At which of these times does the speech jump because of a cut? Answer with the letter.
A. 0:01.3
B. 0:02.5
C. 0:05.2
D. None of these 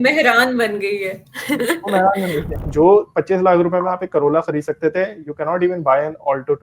B